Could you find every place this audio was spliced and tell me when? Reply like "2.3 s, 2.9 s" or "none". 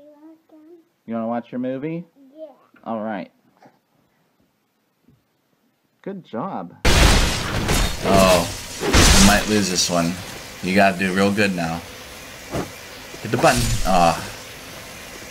2.2 s